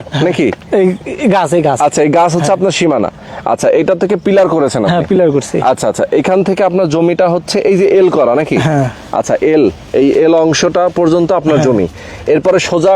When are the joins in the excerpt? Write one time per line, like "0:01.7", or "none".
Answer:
none